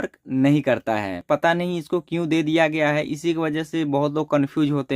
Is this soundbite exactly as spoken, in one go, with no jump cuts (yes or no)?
no